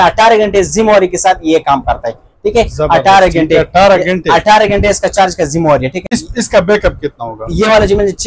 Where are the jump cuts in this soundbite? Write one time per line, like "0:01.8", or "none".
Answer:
0:06.1